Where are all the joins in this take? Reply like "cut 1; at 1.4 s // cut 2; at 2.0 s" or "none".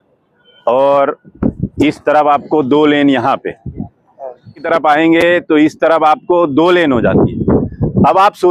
cut 1; at 4.7 s